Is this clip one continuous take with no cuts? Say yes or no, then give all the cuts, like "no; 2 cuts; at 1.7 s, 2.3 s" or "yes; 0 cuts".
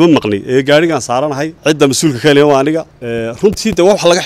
no; 2 cuts; at 1.5 s, 3.0 s